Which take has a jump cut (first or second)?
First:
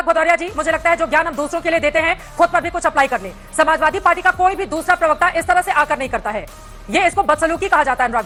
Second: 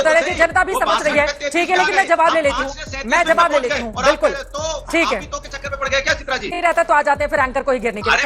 second